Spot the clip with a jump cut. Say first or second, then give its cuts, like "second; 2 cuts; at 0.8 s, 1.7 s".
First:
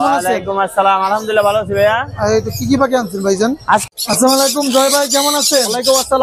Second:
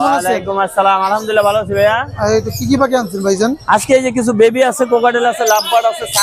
first; 1 cut; at 3.9 s